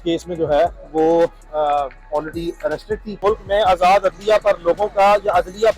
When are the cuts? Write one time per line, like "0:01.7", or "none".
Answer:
0:03.1